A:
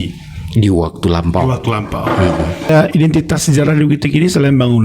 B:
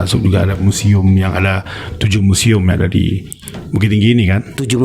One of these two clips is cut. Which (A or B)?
A